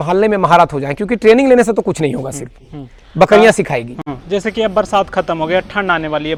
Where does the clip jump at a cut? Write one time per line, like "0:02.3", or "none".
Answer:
none